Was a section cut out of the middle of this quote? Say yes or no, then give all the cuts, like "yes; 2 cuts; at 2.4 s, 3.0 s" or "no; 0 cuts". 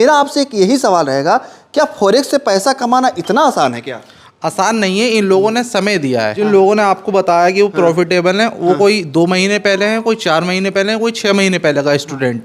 yes; 1 cut; at 6.3 s